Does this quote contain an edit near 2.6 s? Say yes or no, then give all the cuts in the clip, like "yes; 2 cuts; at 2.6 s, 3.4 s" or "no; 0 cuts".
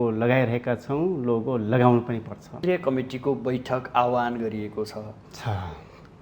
yes; 1 cut; at 2.6 s